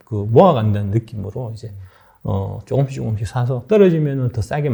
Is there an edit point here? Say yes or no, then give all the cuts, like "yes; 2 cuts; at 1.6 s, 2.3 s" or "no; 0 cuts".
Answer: no; 0 cuts